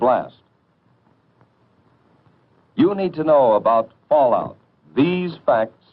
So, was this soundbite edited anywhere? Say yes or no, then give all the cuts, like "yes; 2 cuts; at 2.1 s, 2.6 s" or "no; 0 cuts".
no; 0 cuts